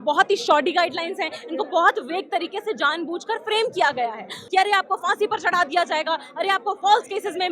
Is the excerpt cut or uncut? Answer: cut